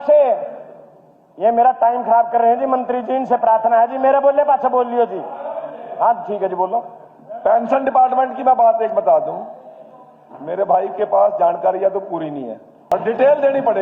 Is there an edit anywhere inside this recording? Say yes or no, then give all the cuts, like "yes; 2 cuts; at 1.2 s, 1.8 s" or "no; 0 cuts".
yes; 1 cut; at 12.8 s